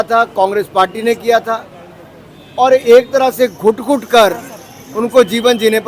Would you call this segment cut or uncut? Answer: uncut